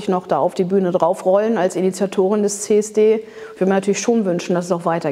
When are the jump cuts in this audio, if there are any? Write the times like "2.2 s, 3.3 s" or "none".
none